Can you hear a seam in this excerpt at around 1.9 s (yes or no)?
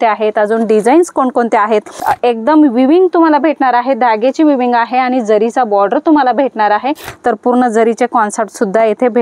yes